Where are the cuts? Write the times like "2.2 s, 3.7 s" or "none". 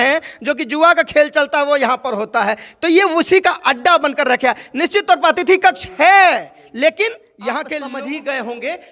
7.8 s

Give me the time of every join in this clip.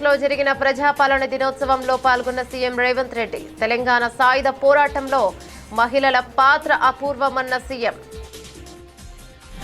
8.0 s

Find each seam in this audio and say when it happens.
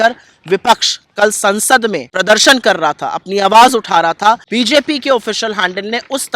2.1 s, 4.4 s

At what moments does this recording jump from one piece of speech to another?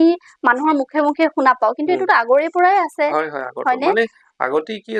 none

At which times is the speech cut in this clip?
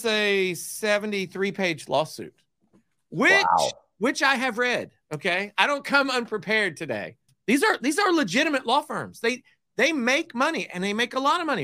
7.3 s

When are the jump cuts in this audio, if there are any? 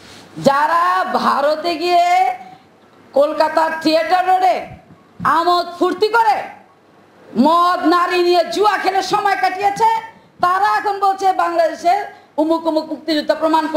none

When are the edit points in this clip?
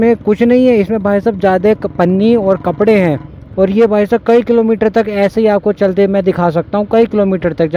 3.4 s

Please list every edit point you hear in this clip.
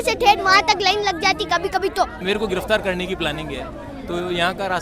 2.2 s

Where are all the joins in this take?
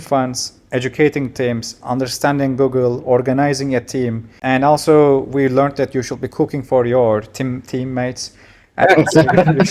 4.3 s

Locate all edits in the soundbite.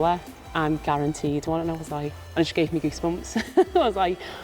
2.2 s

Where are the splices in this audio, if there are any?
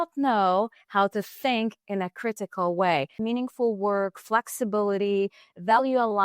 3.2 s

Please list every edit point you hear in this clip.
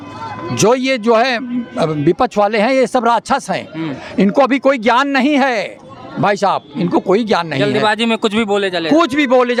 none

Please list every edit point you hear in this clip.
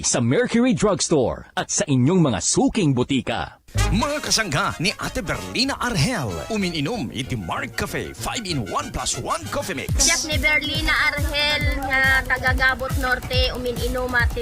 3.5 s

